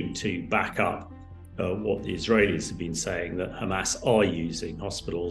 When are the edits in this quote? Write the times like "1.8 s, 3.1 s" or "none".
none